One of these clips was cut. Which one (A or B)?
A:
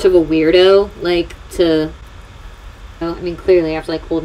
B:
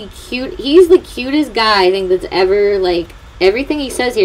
A